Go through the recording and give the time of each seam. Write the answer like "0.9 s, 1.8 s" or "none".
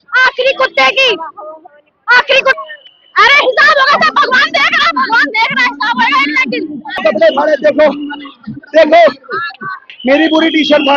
2.6 s, 7.0 s